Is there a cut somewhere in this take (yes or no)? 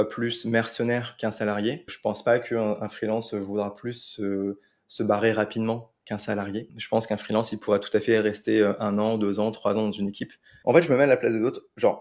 yes